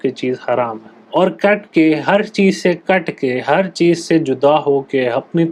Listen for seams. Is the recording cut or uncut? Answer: cut